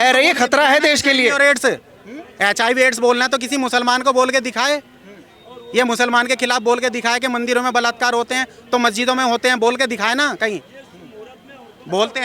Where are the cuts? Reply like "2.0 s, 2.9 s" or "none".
none